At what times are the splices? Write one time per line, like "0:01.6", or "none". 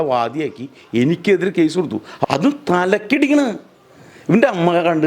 0:02.1